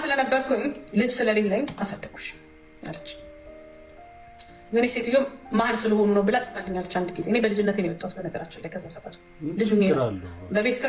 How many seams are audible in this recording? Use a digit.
0